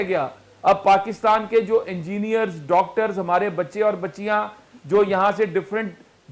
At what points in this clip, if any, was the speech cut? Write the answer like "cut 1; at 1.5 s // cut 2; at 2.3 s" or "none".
none